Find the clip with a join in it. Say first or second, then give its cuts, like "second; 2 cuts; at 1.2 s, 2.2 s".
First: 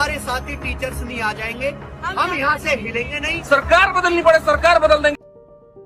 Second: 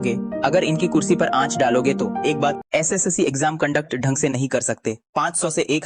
second; 1 cut; at 2.6 s